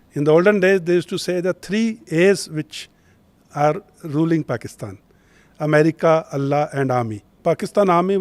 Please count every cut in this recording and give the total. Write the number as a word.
one